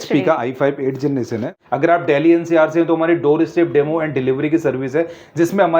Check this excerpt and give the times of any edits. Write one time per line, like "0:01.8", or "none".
0:01.5